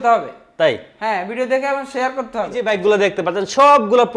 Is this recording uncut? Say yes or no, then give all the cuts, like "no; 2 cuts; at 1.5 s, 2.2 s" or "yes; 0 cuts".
no; 1 cut; at 2.7 s